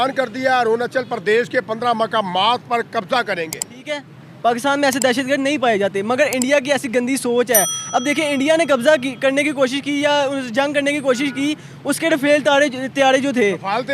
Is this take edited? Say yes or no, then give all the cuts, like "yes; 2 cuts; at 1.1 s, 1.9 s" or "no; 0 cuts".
yes; 1 cut; at 3.9 s